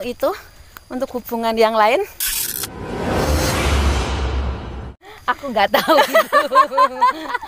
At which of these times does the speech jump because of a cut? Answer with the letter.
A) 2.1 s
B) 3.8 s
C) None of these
C